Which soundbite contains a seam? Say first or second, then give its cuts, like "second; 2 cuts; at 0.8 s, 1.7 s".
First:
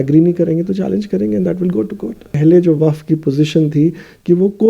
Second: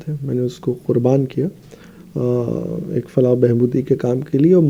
first; 1 cut; at 2.3 s